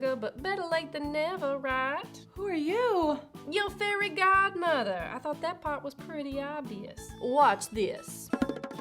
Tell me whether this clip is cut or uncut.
cut